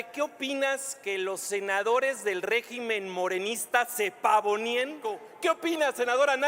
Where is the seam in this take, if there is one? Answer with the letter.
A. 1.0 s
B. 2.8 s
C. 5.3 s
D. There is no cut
C